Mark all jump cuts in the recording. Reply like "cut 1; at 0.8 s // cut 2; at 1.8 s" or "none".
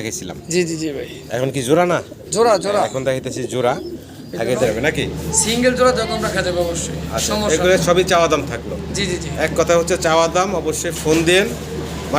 cut 1; at 4.7 s